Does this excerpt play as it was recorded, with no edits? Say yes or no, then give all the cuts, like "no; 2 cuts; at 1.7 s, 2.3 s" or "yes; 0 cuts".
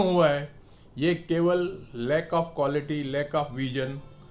yes; 0 cuts